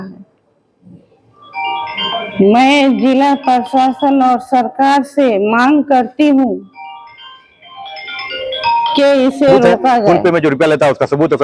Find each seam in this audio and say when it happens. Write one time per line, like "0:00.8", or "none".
0:10.2